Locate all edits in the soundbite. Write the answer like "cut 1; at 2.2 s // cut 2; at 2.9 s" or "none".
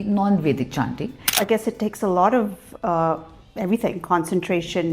cut 1; at 1.4 s